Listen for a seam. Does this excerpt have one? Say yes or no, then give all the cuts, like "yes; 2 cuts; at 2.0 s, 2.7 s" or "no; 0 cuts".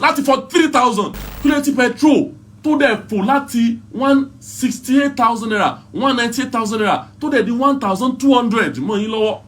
yes; 1 cut; at 1.2 s